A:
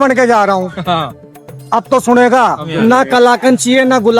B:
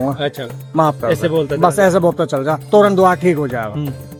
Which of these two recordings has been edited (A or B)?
A